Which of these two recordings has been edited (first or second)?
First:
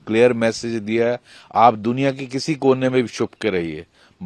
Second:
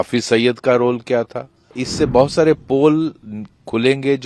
second